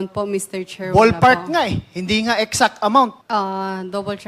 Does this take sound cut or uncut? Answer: cut